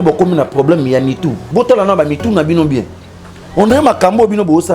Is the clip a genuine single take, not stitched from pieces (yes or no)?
no